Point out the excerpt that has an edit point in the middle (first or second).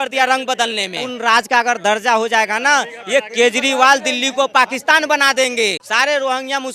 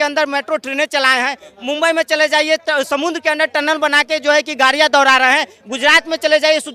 first